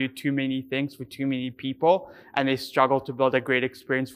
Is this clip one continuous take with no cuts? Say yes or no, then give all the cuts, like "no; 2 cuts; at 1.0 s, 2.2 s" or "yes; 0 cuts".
yes; 0 cuts